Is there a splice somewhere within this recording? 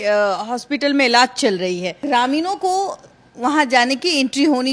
yes; 1 cut; at 2.0 s

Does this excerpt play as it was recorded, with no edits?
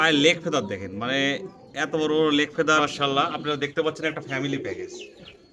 no; 1 cut; at 2.9 s

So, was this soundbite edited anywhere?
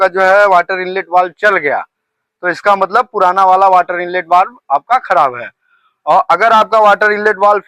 no; 0 cuts

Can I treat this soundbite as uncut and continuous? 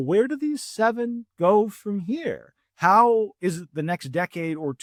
yes; 0 cuts

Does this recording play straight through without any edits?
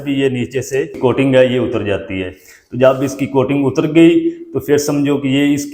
no; 1 cut; at 0.9 s

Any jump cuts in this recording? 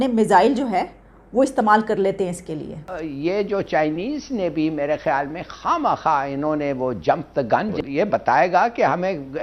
yes; 2 cuts; at 3.0 s, 7.8 s

